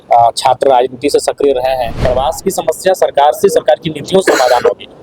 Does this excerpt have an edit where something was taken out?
yes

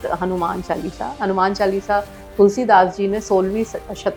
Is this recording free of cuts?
yes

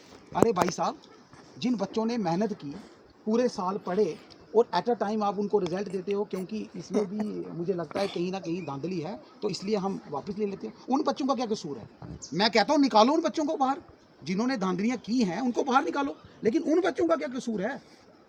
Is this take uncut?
yes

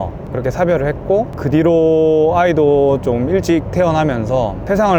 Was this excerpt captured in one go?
yes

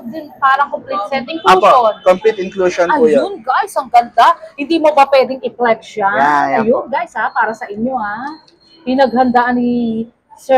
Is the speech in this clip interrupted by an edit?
no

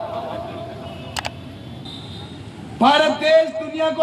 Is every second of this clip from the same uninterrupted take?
no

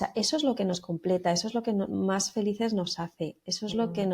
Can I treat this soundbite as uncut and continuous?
yes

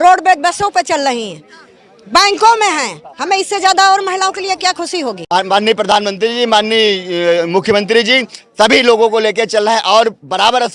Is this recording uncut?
no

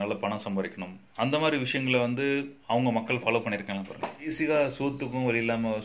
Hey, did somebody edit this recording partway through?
yes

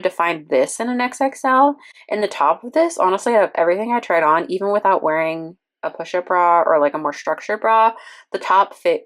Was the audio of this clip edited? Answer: no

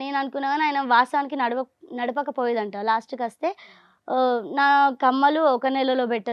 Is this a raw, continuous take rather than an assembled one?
yes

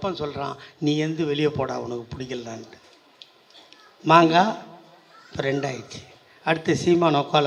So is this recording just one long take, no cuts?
yes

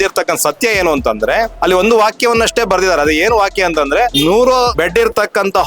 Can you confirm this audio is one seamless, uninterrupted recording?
no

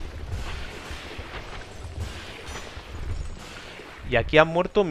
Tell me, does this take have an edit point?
no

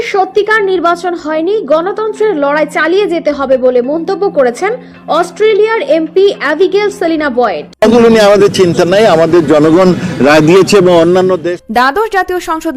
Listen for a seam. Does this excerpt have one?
yes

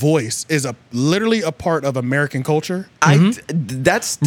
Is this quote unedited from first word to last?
yes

